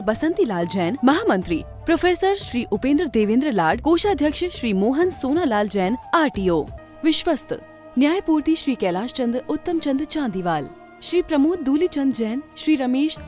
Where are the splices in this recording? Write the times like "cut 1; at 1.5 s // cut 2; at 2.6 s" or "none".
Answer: cut 1; at 6.8 s